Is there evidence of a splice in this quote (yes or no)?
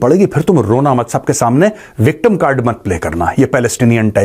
no